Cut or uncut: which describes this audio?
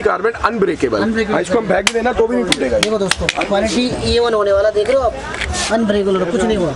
uncut